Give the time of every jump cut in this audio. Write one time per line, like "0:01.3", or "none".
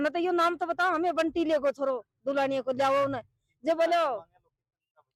none